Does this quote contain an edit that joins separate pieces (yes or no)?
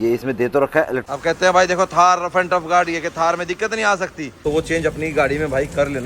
yes